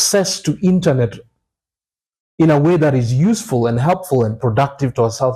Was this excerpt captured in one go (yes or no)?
yes